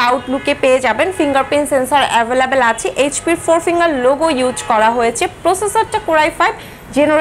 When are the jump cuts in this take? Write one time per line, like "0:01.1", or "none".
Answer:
none